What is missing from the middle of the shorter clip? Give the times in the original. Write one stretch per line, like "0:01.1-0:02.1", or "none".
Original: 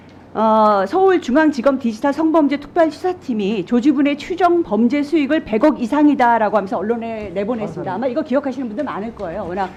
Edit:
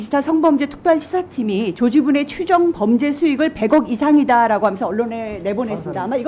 none